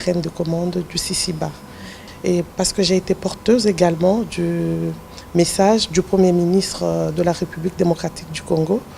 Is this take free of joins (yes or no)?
no